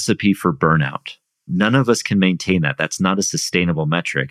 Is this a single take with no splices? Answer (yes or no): no